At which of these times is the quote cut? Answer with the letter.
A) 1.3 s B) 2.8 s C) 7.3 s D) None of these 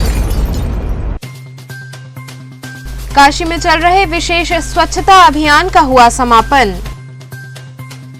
B